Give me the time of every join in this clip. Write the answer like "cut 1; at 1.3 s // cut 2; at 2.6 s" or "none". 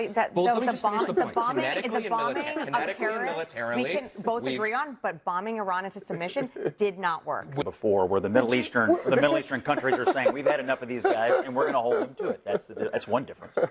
cut 1; at 7.5 s